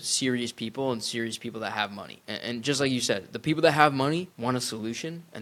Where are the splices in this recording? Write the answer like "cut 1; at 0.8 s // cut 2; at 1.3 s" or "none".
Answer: cut 1; at 2.2 s // cut 2; at 4.3 s